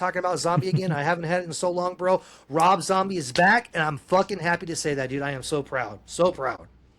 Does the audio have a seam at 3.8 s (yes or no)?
no